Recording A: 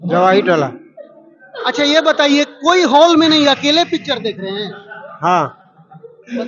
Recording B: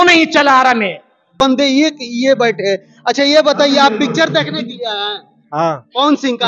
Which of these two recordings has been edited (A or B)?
B